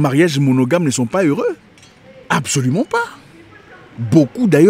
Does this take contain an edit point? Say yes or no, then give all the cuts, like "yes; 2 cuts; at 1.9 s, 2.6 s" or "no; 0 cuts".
no; 0 cuts